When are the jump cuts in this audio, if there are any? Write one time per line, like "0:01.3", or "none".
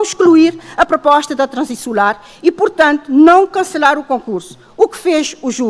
none